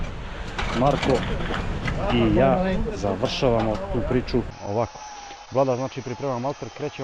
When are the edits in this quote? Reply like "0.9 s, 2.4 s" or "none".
4.5 s